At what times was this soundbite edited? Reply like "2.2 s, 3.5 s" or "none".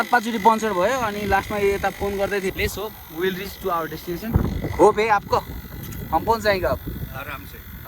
2.5 s